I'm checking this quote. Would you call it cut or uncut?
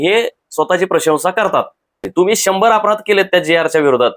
cut